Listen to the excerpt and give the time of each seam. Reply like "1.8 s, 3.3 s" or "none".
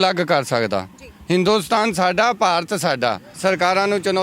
3.3 s